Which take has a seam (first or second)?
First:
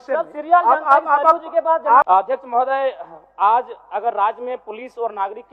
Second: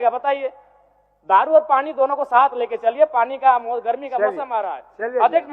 first